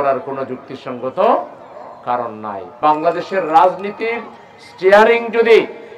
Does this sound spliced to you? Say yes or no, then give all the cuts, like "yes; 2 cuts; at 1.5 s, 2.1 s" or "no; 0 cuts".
yes; 1 cut; at 2.8 s